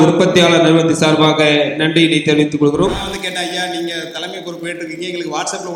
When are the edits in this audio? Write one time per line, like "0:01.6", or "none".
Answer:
0:03.0